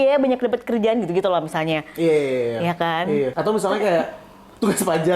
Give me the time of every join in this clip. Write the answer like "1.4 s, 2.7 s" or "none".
3.3 s